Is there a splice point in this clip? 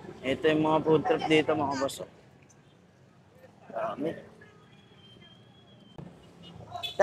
yes; 1 cut; at 5.9 s

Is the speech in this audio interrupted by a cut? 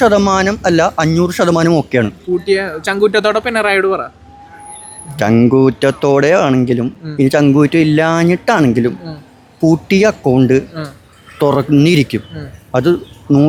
no; 0 cuts

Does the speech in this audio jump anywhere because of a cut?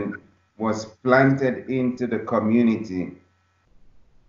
no; 0 cuts

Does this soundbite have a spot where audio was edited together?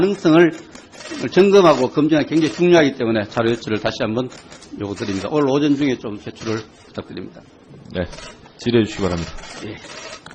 no; 0 cuts

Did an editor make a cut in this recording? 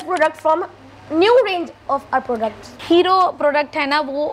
no; 0 cuts

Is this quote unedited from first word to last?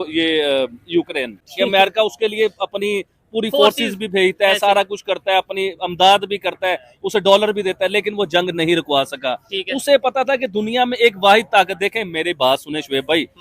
no; 1 cut; at 1.4 s

